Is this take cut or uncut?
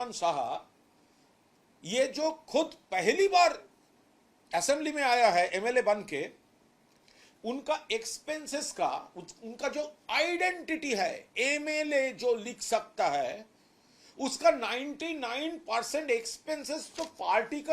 uncut